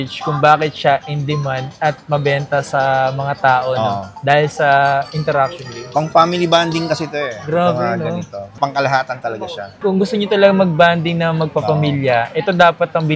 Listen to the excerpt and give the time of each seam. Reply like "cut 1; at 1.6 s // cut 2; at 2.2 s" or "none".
none